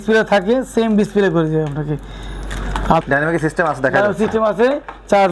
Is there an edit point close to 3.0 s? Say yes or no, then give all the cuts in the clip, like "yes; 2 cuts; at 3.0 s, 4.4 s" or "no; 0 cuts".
yes; 1 cut; at 3.0 s